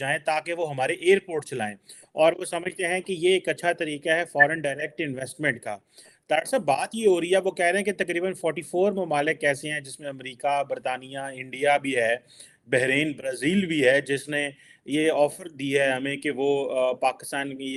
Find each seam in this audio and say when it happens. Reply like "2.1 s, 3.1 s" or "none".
none

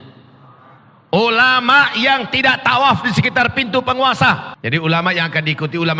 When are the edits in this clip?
4.5 s

